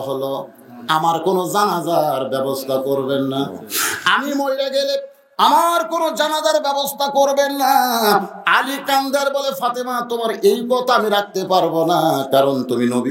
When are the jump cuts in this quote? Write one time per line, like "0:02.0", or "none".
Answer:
none